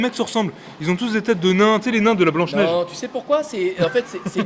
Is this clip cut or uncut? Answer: uncut